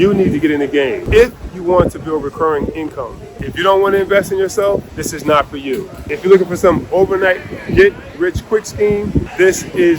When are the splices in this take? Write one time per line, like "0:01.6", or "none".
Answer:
0:01.0
0:03.5
0:05.0
0:06.0
0:09.3